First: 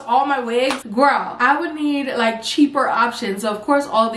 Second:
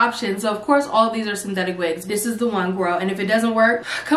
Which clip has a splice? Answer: second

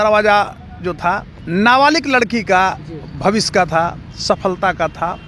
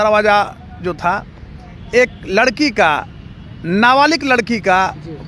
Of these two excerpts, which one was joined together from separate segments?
first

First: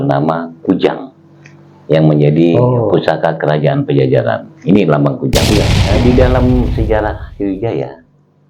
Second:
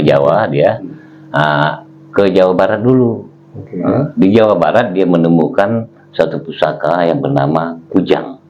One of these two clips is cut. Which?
first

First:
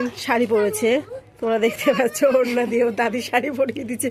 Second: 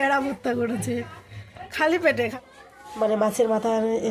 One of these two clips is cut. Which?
second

